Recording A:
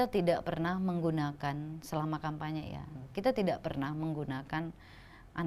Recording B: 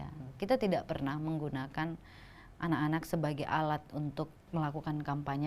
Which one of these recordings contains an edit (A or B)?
B